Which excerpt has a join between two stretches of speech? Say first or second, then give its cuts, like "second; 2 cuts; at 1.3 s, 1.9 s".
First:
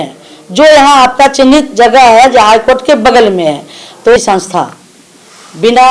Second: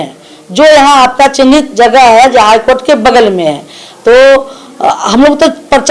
first; 1 cut; at 4.2 s